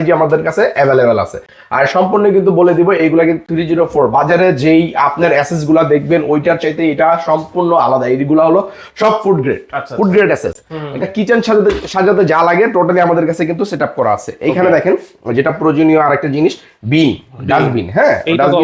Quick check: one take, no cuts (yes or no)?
yes